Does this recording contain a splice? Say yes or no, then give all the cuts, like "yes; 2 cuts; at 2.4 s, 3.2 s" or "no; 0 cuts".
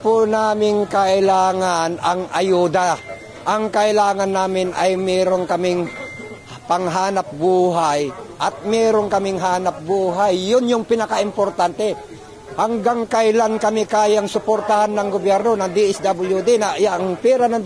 no; 0 cuts